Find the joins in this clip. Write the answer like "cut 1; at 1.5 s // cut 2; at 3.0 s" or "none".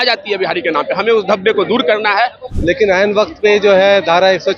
cut 1; at 2.4 s